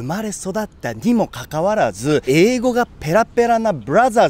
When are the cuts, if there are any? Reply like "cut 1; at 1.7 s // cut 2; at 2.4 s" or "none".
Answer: none

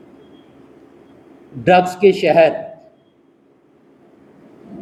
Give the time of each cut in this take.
none

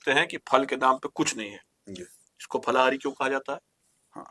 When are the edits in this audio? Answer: none

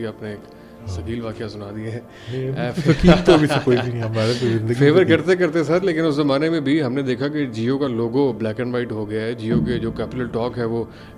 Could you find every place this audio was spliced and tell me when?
none

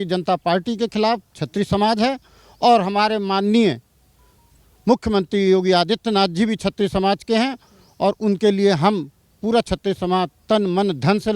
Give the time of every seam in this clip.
none

